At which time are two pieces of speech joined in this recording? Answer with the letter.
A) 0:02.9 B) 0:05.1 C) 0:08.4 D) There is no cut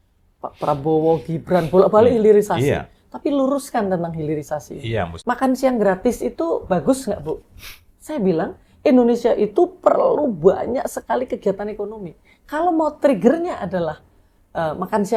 B